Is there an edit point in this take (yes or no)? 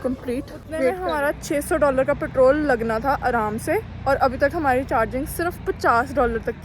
yes